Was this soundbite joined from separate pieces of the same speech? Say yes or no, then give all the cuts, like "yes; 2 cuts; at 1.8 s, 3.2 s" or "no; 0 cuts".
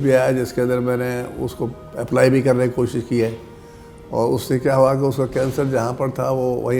no; 0 cuts